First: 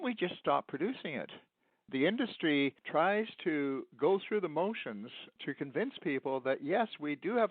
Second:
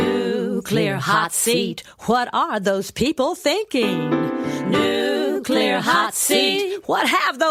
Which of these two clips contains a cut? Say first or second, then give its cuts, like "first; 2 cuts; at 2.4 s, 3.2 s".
first; 2 cuts; at 1.8 s, 2.8 s